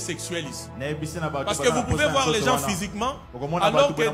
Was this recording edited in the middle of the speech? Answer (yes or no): no